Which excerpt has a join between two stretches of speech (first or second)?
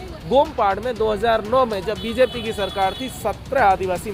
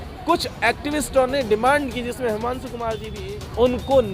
second